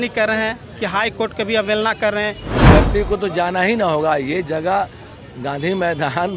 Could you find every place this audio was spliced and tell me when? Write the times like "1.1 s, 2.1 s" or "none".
2.5 s